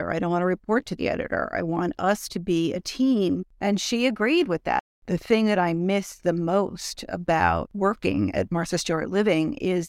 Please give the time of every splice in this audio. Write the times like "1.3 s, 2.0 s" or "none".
3.5 s, 4.9 s, 7.7 s